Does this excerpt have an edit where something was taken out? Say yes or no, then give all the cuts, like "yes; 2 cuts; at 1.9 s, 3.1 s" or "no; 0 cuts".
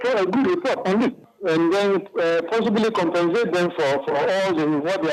no; 0 cuts